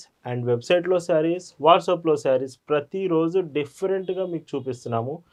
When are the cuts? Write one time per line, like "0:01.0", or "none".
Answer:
none